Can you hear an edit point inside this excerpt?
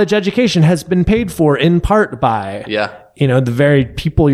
no; 0 cuts

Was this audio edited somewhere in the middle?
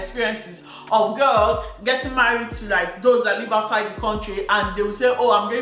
no; 0 cuts

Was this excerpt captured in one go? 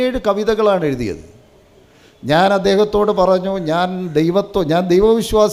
yes; 0 cuts

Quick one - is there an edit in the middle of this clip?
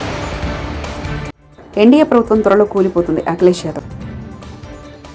yes; 1 cut; at 1.4 s

